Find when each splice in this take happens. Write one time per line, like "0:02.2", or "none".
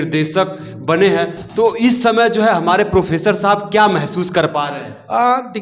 0:01.4

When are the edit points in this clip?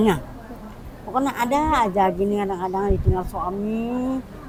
none

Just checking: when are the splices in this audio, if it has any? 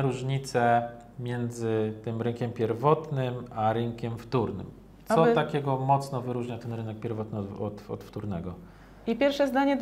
none

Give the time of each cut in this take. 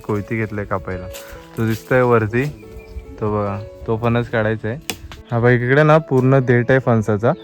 0:05.2

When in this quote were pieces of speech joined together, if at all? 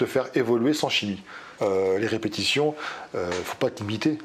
0:01.5

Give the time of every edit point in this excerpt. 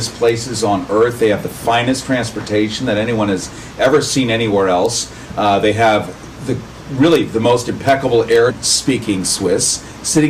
none

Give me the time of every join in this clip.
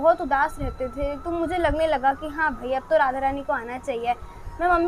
none

